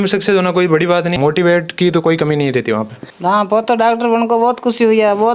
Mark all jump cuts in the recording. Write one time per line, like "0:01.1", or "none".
0:01.2
0:03.0